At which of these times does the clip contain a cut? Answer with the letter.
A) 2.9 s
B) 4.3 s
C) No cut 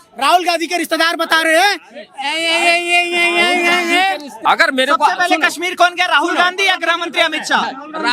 B